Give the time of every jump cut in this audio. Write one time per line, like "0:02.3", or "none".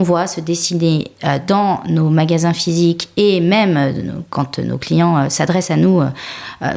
none